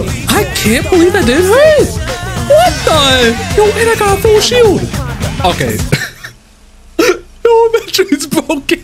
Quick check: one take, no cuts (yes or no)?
yes